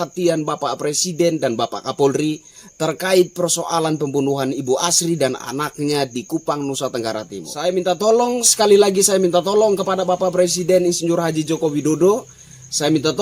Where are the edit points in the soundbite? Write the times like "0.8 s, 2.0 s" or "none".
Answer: 7.4 s